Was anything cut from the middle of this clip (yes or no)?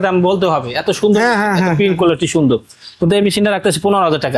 no